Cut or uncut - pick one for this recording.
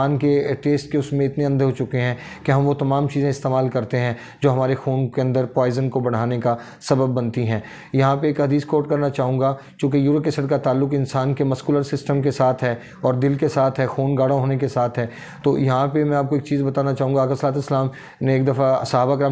uncut